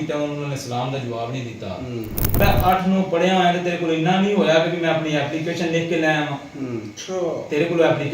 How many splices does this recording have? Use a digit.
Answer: 1